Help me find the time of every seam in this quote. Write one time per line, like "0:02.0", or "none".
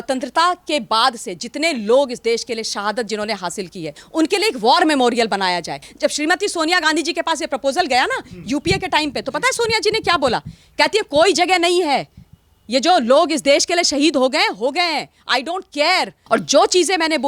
0:04.0
0:05.8
0:16.2